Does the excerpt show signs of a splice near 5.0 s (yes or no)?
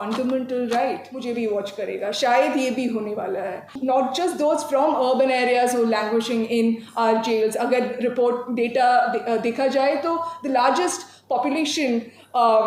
no